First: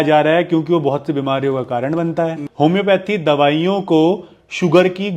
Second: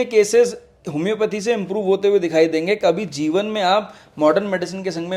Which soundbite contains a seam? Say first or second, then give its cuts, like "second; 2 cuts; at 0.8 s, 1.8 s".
first; 1 cut; at 2.4 s